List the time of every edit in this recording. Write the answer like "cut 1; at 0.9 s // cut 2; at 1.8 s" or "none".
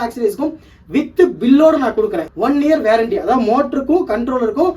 cut 1; at 2.2 s

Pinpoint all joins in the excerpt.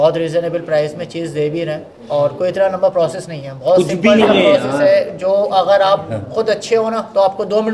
none

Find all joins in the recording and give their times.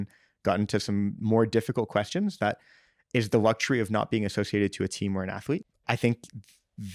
cut 1; at 5.7 s

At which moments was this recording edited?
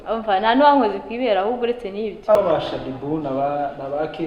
cut 1; at 2.4 s

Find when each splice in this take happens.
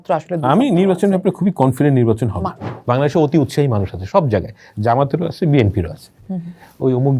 cut 1; at 2.7 s

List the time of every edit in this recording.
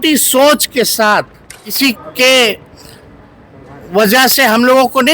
cut 1; at 1.6 s

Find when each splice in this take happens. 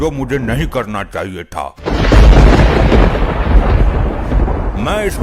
cut 1; at 1.7 s

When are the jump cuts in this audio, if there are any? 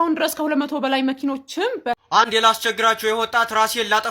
cut 1; at 2.0 s

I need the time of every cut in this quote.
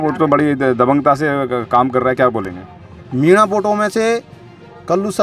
none

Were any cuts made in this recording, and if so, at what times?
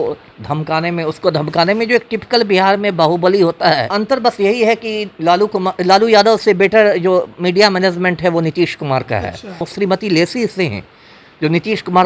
cut 1; at 4.0 s // cut 2; at 9.7 s

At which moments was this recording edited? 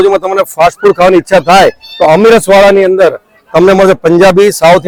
none

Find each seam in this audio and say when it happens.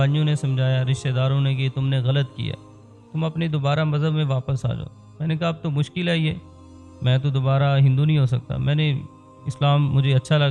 none

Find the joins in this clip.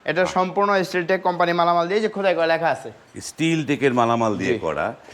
none

